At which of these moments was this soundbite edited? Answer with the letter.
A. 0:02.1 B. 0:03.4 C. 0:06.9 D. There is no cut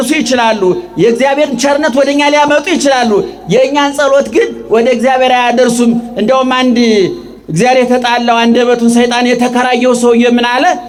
D